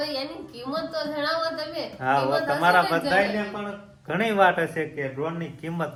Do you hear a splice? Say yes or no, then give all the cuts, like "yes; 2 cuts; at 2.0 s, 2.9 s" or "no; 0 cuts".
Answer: no; 0 cuts